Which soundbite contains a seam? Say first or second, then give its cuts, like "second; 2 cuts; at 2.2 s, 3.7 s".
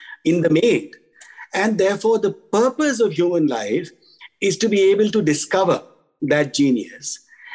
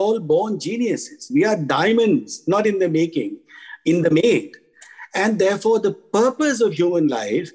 second; 1 cut; at 1.3 s